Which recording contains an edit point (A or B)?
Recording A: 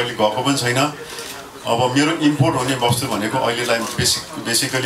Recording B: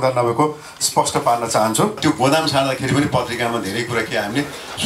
B